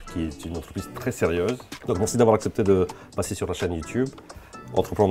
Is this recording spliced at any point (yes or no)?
yes